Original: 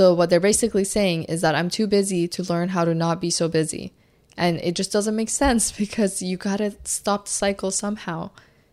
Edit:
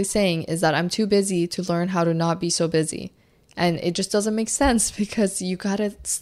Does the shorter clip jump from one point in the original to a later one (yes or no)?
no